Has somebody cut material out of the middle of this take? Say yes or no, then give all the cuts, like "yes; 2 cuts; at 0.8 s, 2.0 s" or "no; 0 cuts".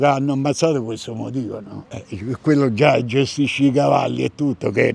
no; 0 cuts